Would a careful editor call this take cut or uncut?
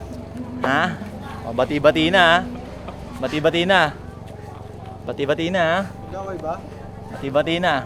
uncut